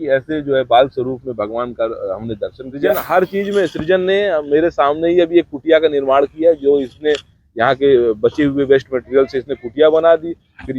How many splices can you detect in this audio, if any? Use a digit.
1